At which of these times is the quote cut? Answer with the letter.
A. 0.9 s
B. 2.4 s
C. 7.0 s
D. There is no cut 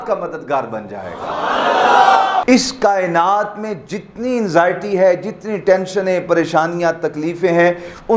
B